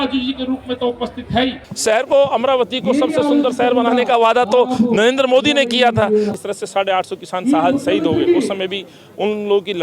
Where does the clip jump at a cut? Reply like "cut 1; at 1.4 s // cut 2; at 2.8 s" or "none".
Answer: cut 1; at 1.7 s // cut 2; at 6.3 s